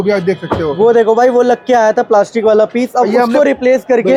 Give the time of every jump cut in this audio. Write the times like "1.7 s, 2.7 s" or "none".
none